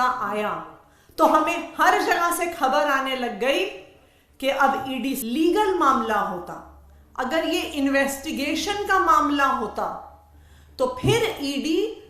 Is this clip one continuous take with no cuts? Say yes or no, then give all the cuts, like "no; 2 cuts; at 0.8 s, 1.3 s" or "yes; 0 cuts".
no; 1 cut; at 5.2 s